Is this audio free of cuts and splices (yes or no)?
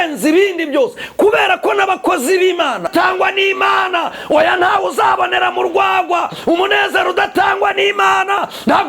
no